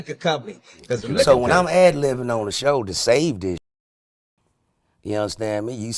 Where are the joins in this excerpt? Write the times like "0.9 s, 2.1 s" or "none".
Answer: 1.2 s